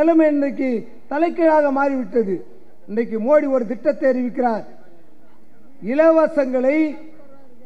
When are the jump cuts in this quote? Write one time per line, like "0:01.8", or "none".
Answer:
none